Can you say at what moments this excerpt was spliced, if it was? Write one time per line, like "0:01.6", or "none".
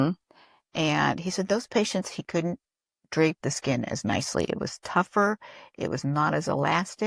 none